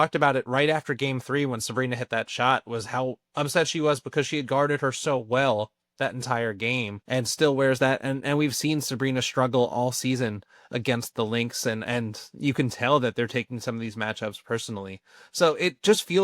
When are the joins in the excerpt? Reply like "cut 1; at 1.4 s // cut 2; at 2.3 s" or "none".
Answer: cut 1; at 7.0 s